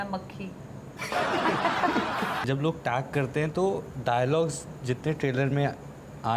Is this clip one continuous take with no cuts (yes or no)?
no